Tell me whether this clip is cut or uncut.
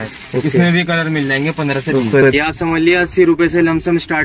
cut